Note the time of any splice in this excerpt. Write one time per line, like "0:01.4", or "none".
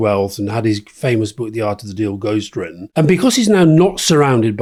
none